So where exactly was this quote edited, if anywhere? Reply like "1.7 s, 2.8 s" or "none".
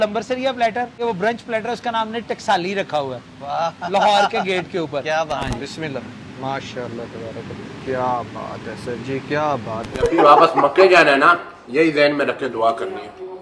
0.9 s, 5.4 s, 7.8 s, 10.0 s